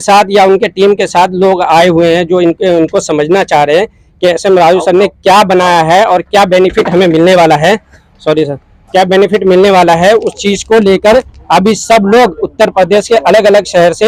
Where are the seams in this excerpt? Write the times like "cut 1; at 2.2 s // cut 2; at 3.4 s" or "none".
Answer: none